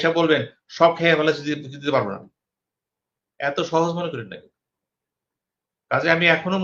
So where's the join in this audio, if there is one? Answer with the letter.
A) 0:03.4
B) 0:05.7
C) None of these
C